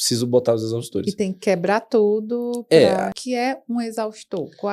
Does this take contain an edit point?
yes; 1 cut; at 3.2 s

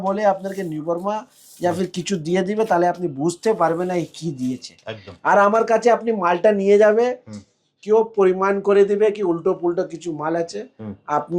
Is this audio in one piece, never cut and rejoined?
yes; 0 cuts

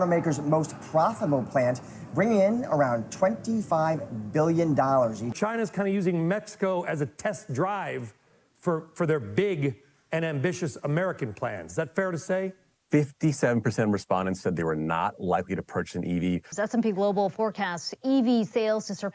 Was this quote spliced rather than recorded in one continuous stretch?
yes; 3 cuts; at 5.3 s, 12.6 s, 16.5 s

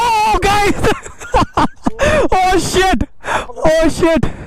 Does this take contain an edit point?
no; 0 cuts

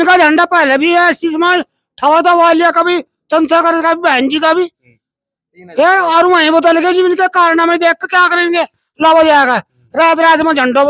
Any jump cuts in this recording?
no; 0 cuts

